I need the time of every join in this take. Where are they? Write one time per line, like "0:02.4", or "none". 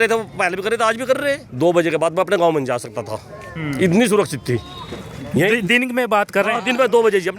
0:01.5